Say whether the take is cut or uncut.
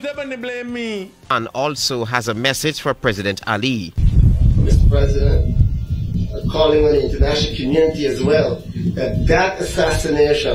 cut